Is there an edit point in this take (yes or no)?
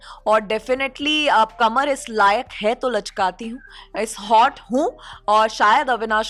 no